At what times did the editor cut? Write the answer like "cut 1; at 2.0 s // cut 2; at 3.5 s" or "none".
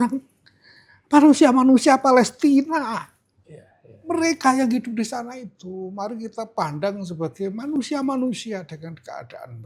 none